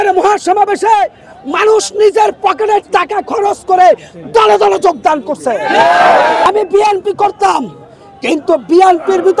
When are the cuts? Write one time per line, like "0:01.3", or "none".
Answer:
0:06.5